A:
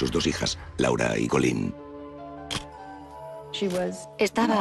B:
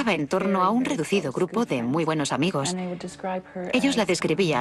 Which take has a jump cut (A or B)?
A